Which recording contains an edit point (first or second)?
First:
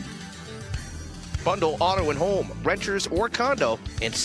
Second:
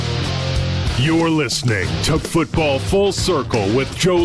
first